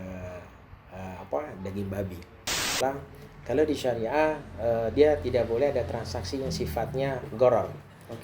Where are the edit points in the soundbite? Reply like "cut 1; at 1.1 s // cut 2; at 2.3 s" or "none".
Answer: cut 1; at 2.7 s